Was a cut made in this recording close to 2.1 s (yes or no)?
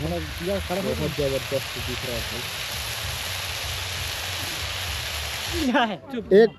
no